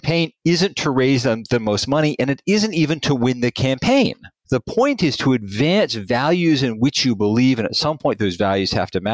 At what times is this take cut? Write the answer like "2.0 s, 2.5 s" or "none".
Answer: none